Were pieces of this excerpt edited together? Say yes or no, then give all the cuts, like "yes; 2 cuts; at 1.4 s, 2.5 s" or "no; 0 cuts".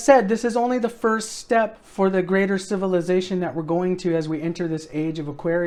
no; 0 cuts